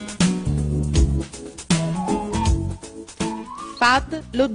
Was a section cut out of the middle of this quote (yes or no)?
yes